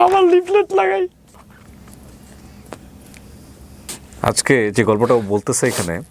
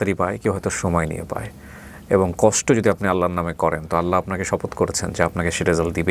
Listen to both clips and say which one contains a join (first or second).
first